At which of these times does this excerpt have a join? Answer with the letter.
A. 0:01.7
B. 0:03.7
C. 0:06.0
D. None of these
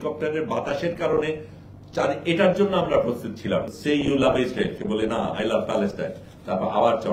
B